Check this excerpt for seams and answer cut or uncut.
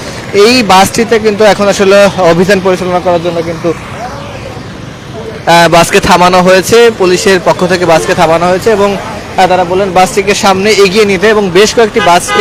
uncut